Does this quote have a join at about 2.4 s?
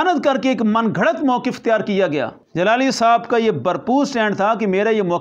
yes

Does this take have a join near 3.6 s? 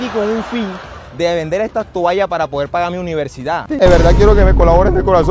yes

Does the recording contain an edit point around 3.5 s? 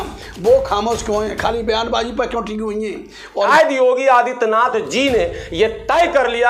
yes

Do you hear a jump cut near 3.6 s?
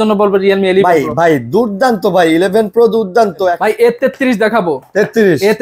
yes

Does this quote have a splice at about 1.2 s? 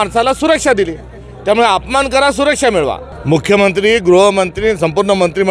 no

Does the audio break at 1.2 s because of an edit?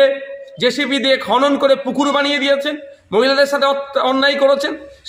no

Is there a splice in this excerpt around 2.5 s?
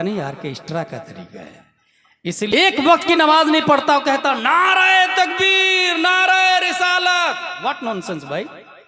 yes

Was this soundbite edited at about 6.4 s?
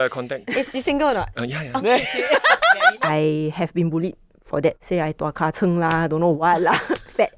no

